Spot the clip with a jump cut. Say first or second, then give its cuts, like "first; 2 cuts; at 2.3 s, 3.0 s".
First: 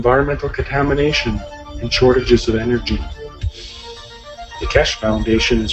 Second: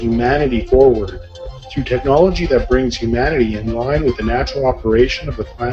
second; 1 cut; at 4.3 s